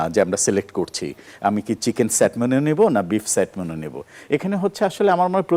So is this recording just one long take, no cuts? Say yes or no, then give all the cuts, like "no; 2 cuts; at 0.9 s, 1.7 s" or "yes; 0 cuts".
yes; 0 cuts